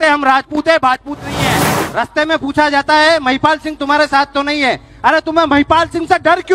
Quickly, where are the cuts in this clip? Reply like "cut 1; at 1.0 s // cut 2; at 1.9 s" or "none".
cut 1; at 1.8 s